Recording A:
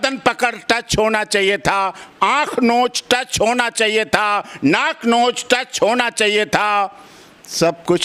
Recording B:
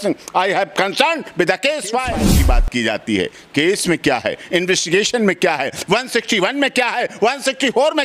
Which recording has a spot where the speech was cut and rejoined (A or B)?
B